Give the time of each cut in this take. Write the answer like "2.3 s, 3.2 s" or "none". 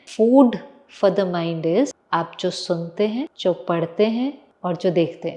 2.0 s, 3.3 s, 4.5 s